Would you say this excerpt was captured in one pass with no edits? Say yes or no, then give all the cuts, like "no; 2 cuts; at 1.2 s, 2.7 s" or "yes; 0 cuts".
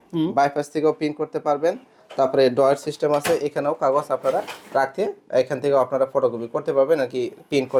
yes; 0 cuts